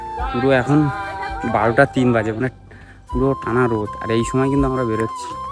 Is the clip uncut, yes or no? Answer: yes